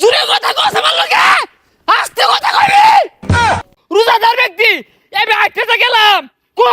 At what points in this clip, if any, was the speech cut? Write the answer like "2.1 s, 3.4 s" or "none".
3.5 s